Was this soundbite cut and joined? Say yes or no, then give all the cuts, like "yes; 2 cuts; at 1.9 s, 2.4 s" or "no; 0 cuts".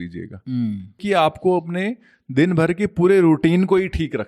yes; 1 cut; at 1.0 s